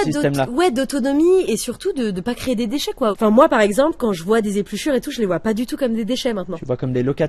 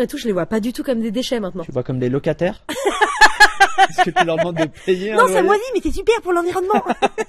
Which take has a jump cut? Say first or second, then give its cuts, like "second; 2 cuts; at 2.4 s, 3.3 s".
first; 1 cut; at 3.2 s